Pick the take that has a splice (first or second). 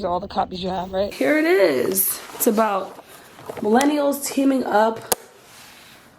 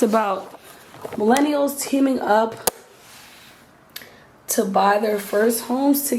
first